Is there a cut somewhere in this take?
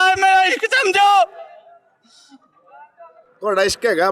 yes; 1 cut; at 3.2 s

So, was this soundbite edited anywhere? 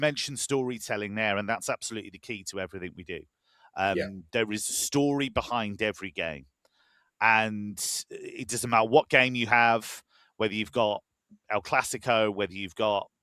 no; 0 cuts

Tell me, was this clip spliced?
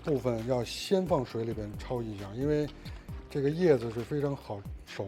no; 0 cuts

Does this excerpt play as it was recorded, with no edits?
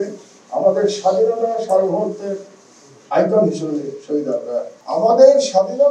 no; 1 cut; at 4.8 s

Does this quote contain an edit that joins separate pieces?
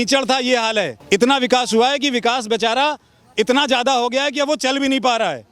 yes; 1 cut; at 1.0 s

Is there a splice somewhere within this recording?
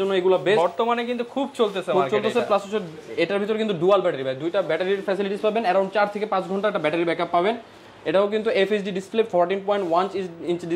no; 0 cuts

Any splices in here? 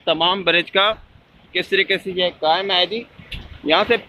no; 0 cuts

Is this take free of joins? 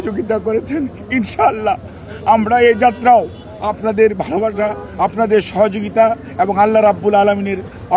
yes; 0 cuts

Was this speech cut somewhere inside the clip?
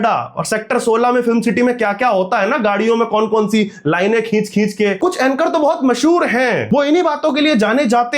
yes; 2 cuts; at 5.0 s, 6.6 s

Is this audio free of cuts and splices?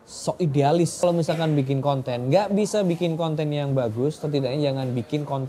no; 1 cut; at 1.0 s

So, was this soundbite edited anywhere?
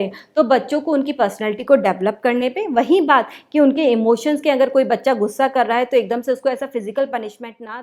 no; 0 cuts

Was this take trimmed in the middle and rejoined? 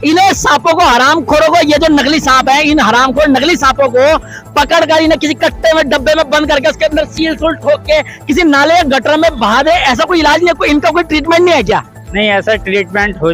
no; 0 cuts

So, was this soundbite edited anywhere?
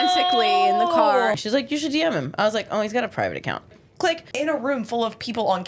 yes; 2 cuts; at 1.3 s, 4.1 s

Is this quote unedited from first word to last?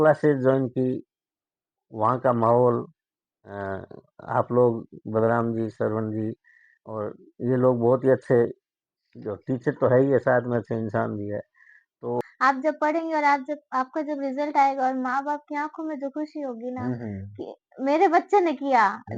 no; 1 cut; at 12.2 s

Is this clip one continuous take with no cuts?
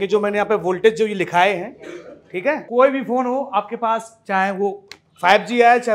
no; 1 cut; at 2.6 s

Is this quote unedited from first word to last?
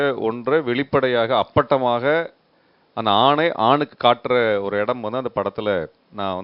yes; 0 cuts

